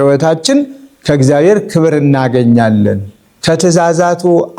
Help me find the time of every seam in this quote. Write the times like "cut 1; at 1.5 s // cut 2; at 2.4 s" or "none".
cut 1; at 3.3 s